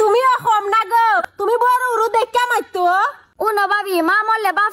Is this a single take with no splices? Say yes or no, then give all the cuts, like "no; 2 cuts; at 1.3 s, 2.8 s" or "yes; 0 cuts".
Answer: no; 2 cuts; at 1.3 s, 3.2 s